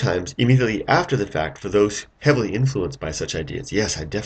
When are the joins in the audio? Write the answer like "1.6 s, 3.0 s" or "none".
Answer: 2.5 s